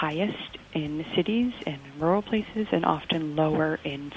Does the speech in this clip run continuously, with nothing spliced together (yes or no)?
yes